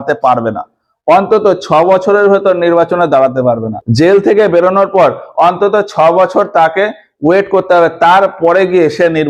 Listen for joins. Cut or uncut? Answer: uncut